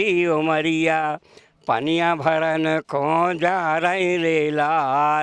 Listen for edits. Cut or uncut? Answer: uncut